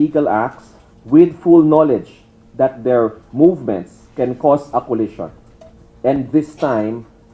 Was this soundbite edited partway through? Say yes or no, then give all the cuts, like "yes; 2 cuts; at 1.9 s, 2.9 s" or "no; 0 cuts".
no; 0 cuts